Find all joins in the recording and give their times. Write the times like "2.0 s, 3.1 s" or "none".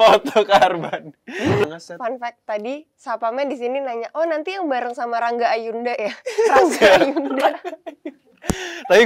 1.6 s